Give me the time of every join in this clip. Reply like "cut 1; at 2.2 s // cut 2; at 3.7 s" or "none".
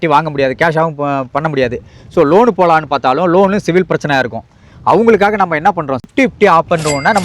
cut 1; at 6.0 s